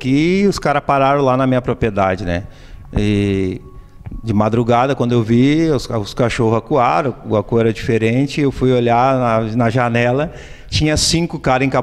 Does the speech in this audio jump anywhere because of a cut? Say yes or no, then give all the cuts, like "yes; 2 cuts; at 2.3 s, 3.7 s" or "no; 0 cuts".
no; 0 cuts